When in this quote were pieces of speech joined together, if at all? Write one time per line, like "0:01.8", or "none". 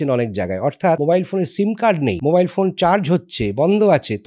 0:01.0
0:02.2